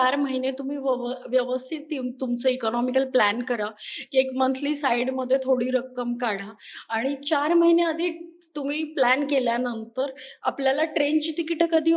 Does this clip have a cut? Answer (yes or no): no